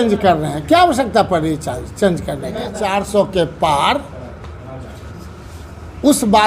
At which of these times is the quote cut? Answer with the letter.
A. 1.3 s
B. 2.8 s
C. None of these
B